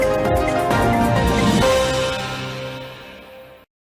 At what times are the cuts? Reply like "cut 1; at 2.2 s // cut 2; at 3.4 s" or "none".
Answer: none